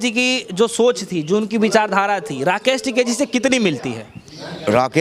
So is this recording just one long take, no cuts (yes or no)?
yes